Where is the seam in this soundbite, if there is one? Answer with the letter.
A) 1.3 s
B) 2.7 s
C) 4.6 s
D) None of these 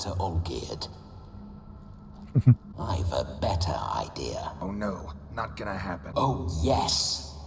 B